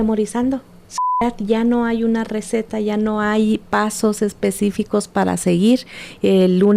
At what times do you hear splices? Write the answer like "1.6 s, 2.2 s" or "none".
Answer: 1.2 s